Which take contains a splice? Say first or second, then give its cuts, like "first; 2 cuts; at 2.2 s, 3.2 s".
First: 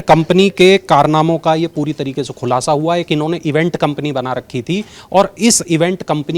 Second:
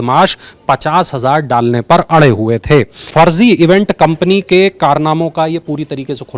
second; 1 cut; at 3.0 s